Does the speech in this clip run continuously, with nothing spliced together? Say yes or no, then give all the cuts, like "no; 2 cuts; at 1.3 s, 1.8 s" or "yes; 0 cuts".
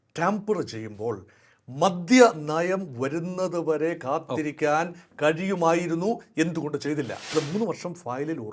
no; 1 cut; at 7.3 s